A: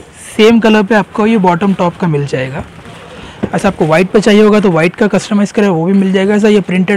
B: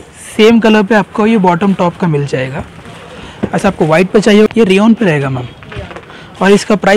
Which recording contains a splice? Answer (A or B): B